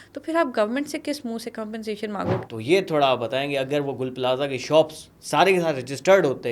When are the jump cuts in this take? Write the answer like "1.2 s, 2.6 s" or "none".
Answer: 2.4 s